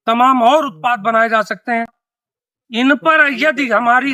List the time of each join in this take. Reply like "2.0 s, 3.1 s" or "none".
none